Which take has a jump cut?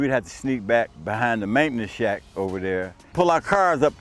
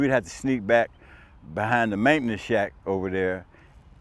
first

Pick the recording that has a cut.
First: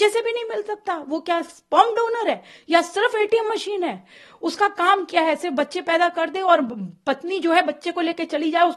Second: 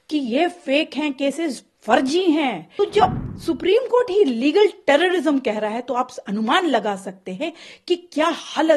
second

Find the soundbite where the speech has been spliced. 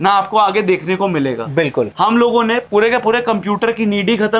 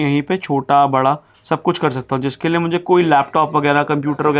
first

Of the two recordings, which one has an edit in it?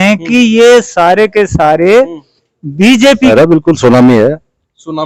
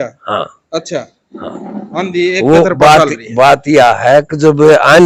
first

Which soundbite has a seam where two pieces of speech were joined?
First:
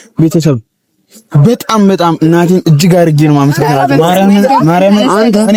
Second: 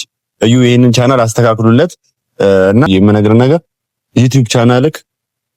second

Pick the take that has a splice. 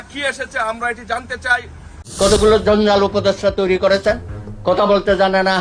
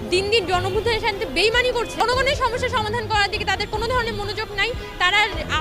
first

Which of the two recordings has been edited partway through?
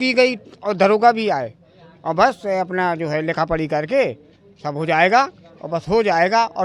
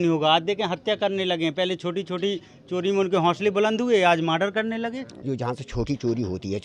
second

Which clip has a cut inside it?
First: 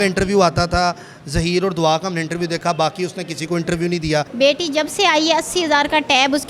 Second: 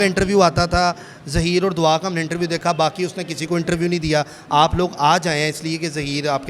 first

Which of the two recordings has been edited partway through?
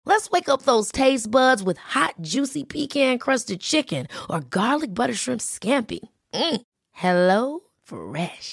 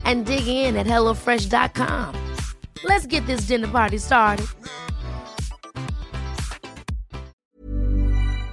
second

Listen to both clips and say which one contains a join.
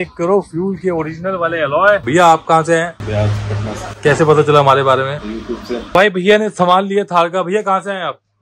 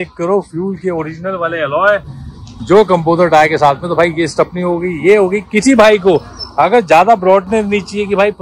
first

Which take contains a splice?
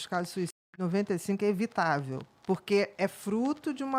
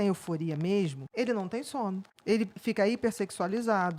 second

